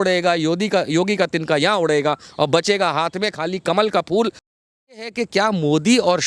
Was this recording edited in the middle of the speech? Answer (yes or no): yes